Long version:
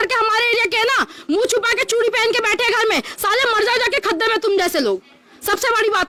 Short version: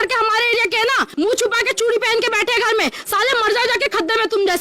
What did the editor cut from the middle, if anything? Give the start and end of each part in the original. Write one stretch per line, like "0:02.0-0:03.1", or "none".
0:01.1-0:01.2